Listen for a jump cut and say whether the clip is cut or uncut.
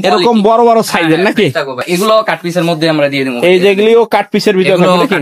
cut